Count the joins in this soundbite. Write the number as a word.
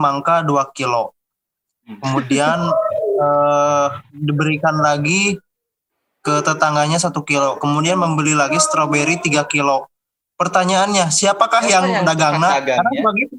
zero